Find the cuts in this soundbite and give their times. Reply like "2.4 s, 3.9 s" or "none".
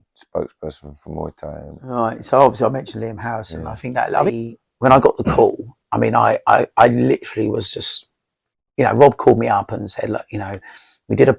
1.9 s, 4.4 s